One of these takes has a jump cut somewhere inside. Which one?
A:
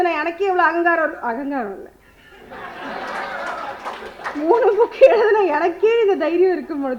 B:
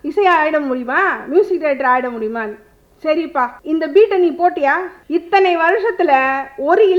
B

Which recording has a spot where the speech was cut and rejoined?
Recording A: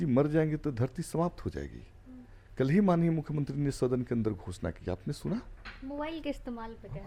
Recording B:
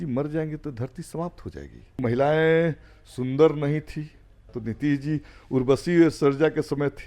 B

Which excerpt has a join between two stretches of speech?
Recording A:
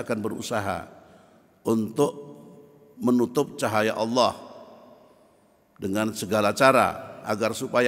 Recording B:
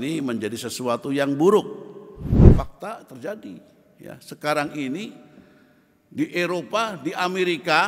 B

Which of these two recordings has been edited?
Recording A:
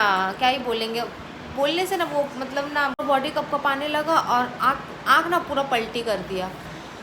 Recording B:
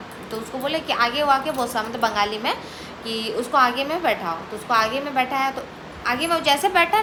A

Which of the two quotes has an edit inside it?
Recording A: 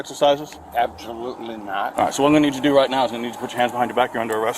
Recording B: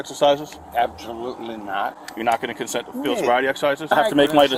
A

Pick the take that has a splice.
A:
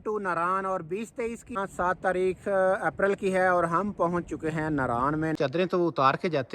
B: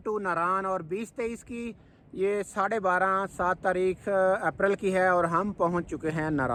A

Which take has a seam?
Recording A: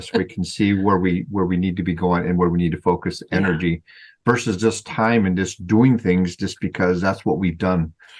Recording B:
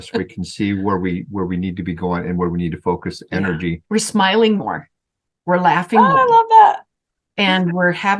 B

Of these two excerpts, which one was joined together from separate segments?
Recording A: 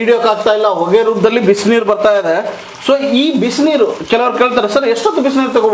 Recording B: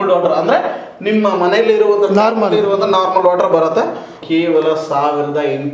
B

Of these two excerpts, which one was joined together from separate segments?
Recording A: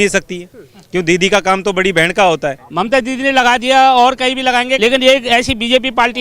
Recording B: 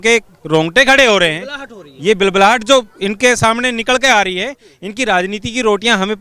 A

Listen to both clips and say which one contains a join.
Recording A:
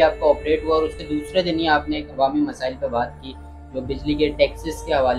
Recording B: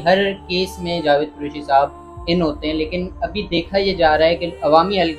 A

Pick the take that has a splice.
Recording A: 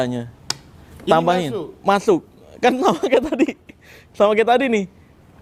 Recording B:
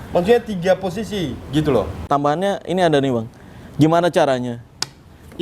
B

